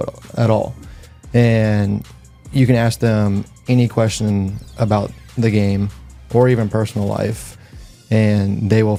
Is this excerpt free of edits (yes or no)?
yes